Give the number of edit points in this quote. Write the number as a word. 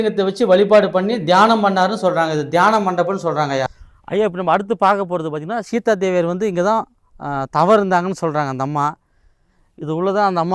one